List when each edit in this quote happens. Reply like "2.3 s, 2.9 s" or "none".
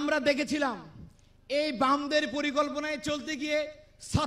none